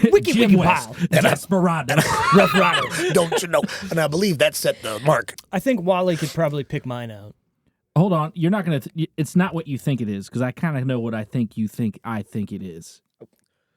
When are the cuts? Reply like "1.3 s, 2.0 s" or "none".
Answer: 5.3 s